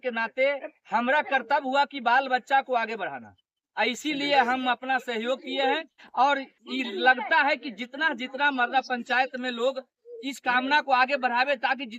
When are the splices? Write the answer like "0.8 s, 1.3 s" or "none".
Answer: none